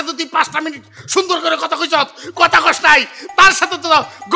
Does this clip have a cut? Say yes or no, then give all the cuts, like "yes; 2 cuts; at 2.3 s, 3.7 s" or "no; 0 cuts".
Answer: no; 0 cuts